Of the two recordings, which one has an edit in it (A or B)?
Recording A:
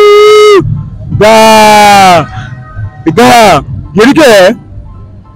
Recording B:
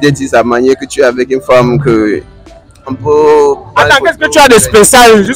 B